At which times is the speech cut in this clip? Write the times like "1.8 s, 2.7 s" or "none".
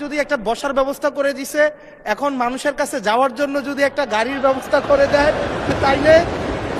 none